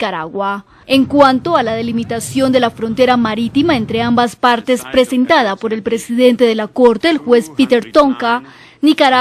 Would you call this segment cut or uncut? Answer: cut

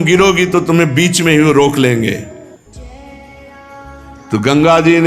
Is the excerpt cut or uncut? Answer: cut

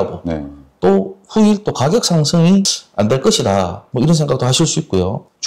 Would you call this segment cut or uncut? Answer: uncut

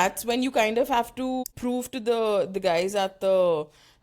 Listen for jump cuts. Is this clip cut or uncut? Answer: cut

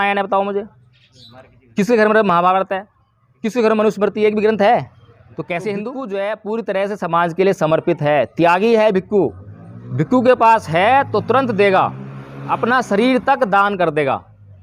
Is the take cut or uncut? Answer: cut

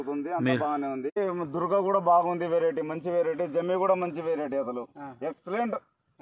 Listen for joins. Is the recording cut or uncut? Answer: cut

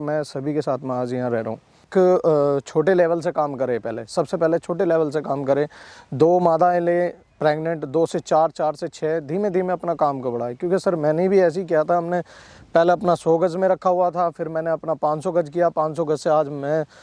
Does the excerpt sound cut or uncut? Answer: cut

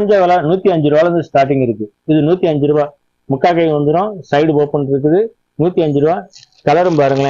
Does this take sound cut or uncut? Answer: uncut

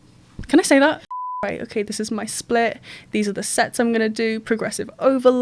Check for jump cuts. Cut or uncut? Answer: cut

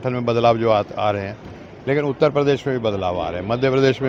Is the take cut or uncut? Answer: uncut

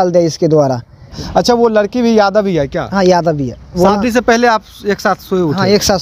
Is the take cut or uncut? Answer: cut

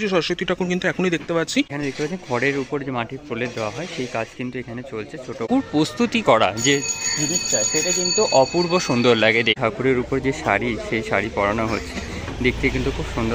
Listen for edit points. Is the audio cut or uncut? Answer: cut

